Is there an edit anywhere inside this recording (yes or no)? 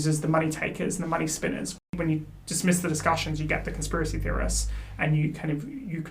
yes